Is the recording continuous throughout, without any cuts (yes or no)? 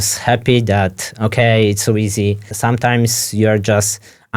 no